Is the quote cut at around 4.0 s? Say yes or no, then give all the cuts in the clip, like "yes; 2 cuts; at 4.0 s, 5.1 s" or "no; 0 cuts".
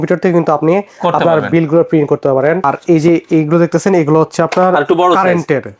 no; 1 cut; at 2.6 s